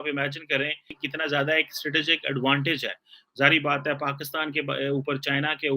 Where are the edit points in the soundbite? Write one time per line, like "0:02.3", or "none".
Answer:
0:01.0